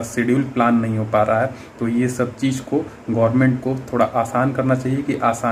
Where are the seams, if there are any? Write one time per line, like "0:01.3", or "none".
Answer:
none